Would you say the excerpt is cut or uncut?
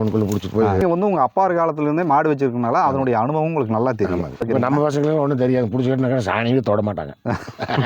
cut